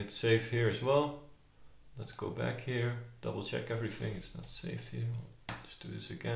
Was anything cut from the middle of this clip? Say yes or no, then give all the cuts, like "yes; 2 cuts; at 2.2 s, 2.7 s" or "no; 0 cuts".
no; 0 cuts